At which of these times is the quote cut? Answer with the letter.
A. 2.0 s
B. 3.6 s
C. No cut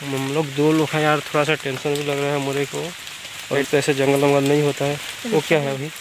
B